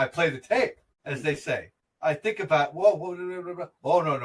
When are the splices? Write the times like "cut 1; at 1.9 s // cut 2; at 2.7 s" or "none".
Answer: cut 1; at 0.9 s // cut 2; at 1.8 s